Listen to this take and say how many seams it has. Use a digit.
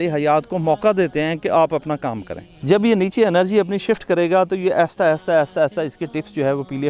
1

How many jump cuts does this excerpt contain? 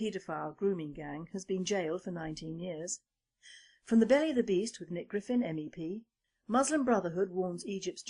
1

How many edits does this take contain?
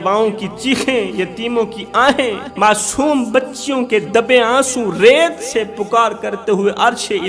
1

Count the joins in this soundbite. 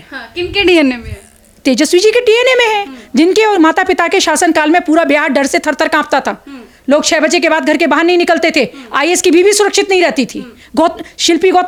0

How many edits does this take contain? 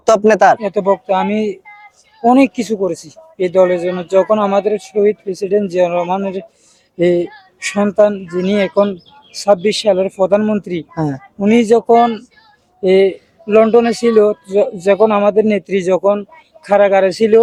0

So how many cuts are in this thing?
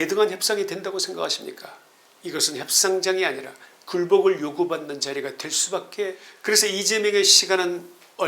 1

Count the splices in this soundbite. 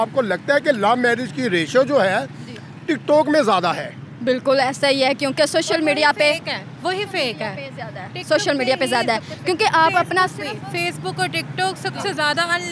0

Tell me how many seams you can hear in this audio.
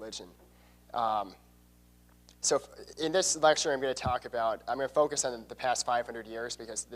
1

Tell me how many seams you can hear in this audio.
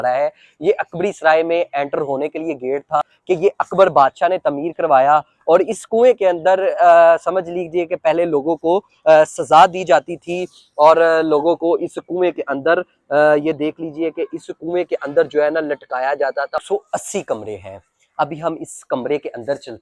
2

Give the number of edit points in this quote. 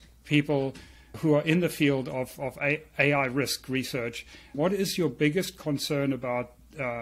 2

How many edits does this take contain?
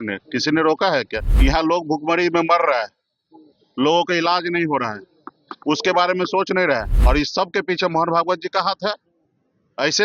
2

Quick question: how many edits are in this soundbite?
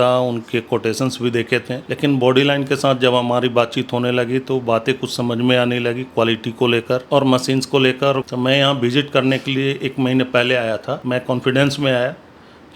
4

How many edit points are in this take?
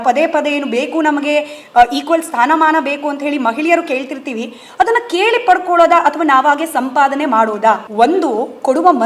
1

